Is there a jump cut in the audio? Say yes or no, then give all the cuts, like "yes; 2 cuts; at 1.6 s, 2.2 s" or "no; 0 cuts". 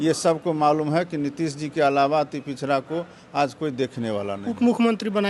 no; 0 cuts